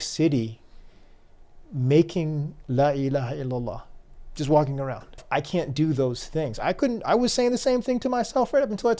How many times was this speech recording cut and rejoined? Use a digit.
1